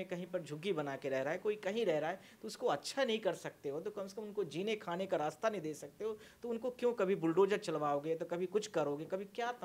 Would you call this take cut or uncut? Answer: uncut